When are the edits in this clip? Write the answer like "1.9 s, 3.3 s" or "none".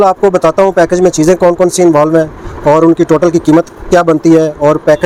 none